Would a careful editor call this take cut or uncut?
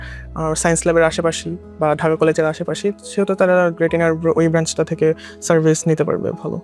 uncut